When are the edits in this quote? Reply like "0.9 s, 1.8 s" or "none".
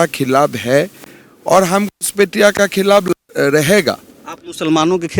none